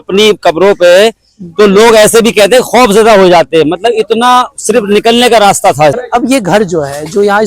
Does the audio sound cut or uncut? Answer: cut